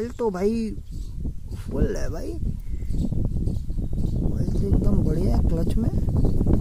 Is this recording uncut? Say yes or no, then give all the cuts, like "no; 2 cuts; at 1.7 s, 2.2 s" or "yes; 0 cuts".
yes; 0 cuts